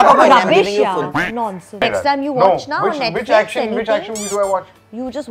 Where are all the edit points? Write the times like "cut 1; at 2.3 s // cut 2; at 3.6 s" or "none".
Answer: cut 1; at 1.6 s